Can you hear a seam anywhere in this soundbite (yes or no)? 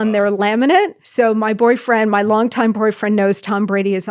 yes